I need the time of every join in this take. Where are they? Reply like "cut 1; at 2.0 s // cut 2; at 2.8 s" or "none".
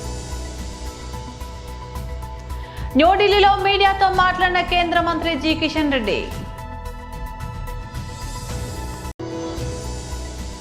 cut 1; at 6.3 s // cut 2; at 8.9 s